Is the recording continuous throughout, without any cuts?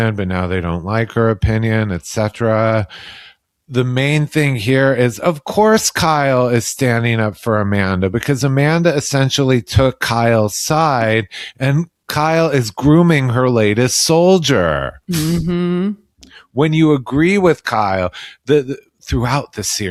yes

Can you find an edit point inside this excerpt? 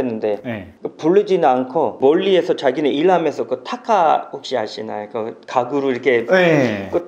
no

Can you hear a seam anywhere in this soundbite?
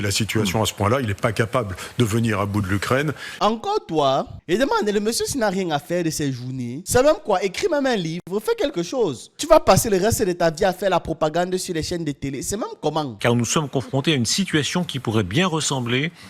yes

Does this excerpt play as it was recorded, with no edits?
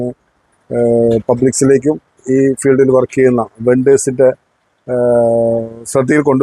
yes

